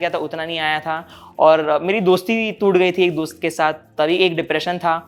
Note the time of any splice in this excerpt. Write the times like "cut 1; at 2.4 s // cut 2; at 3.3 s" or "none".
none